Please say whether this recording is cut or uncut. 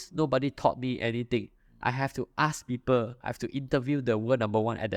uncut